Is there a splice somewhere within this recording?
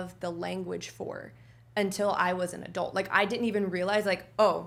no; 0 cuts

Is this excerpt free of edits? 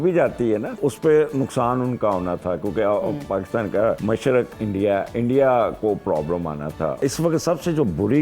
no; 3 cuts; at 0.8 s, 4.0 s, 7.0 s

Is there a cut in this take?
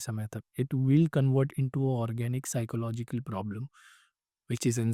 no; 0 cuts

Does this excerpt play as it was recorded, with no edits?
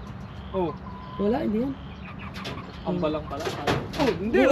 yes; 0 cuts

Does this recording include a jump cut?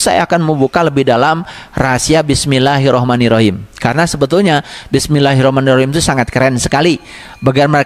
no; 0 cuts

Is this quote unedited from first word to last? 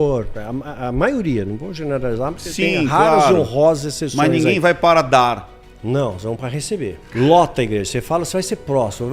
no; 1 cut; at 7.0 s

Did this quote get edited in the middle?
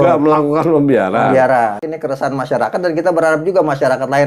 yes; 1 cut; at 1.9 s

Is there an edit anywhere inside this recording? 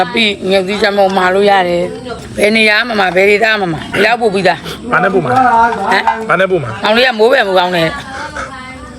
yes; 2 cuts; at 2.2 s, 3.9 s

